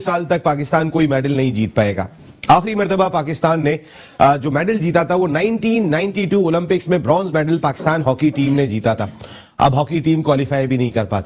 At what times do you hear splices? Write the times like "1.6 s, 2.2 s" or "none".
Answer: none